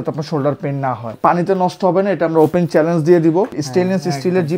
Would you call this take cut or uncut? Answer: cut